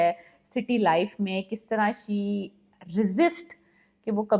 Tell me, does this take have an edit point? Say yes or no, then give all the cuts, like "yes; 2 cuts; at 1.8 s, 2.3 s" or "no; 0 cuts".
no; 0 cuts